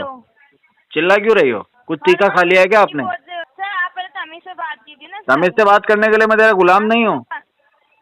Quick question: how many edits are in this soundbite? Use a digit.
1